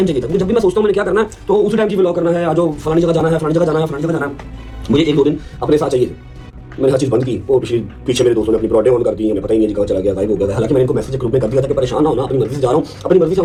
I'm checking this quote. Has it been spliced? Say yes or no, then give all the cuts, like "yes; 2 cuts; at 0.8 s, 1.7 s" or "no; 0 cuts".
no; 0 cuts